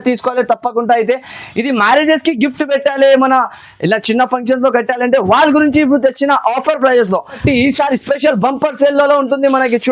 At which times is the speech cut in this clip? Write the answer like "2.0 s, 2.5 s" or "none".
7.4 s